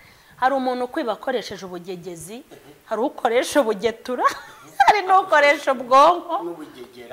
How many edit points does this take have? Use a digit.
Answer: 0